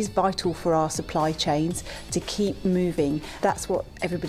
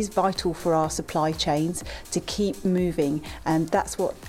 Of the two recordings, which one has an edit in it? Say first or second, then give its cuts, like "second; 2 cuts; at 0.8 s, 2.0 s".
first; 1 cut; at 3.4 s